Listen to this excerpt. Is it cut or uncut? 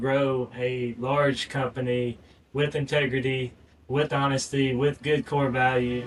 uncut